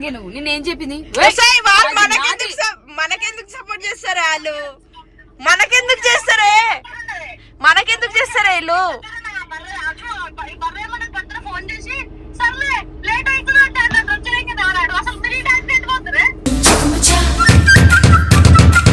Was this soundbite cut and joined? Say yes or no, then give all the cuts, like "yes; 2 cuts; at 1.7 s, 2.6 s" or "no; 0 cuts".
no; 0 cuts